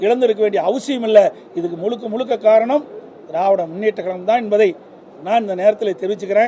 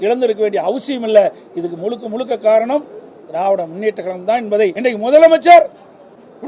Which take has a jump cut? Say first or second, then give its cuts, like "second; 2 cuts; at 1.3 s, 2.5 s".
second; 1 cut; at 4.8 s